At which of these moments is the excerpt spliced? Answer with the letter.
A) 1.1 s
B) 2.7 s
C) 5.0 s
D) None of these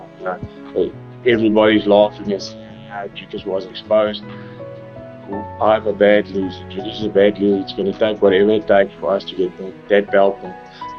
D